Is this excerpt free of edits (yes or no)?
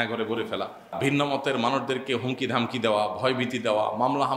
no